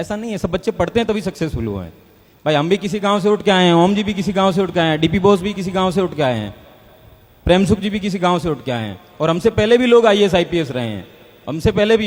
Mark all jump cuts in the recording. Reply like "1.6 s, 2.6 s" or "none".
none